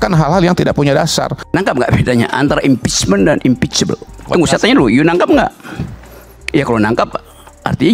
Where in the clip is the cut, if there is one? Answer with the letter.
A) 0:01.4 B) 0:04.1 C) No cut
A